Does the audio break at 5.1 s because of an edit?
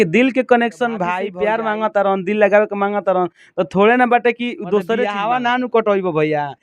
yes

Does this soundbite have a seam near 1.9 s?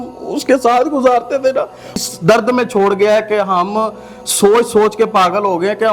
yes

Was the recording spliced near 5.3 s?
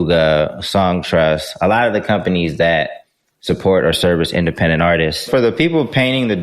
yes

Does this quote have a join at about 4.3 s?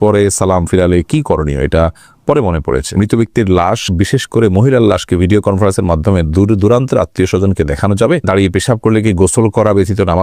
no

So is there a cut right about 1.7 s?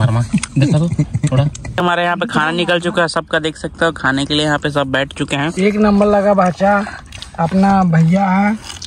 yes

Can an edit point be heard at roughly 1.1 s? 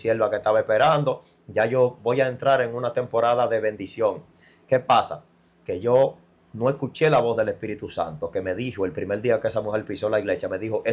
no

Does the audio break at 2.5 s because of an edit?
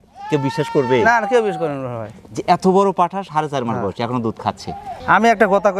no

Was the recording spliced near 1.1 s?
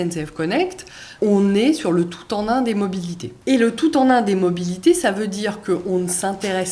yes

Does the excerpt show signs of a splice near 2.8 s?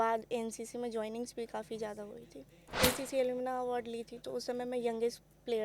yes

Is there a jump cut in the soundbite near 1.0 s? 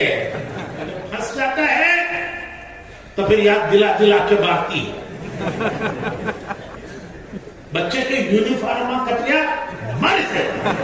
yes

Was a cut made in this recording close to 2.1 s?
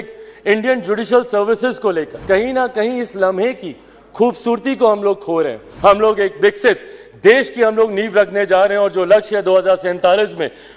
yes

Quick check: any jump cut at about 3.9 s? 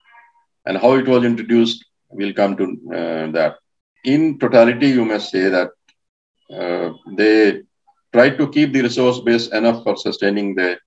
yes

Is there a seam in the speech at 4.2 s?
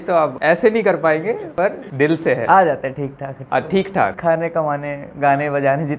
yes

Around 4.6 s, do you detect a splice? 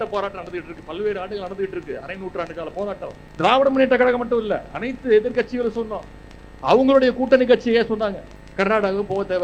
no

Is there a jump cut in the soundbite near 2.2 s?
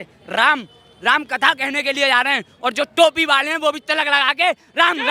no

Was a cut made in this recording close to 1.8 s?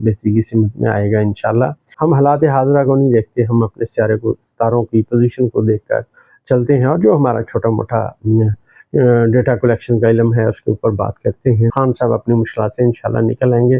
yes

